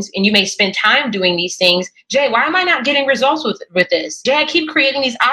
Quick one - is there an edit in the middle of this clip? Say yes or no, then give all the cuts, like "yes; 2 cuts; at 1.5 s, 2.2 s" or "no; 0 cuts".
yes; 1 cut; at 4.1 s